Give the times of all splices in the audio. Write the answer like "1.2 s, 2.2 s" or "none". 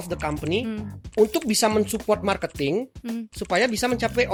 none